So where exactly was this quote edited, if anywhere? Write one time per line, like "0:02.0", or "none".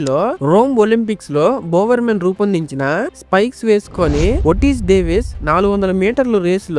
none